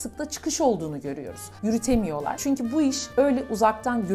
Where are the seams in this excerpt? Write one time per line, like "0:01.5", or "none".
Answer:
0:02.4